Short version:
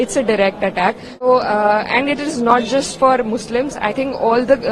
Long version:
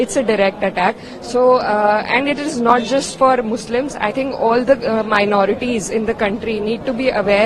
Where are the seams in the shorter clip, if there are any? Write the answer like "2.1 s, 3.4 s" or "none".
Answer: 1.2 s